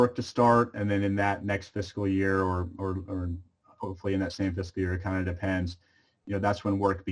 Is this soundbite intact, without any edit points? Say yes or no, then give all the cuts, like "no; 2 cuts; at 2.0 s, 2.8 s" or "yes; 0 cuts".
yes; 0 cuts